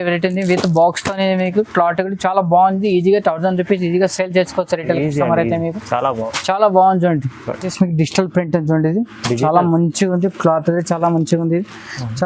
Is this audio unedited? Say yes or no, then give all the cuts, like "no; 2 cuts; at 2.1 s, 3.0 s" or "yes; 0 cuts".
yes; 0 cuts